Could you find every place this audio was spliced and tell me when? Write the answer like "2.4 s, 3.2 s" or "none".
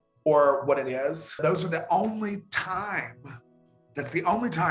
1.4 s